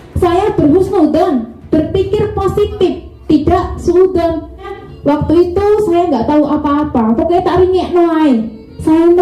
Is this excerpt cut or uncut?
cut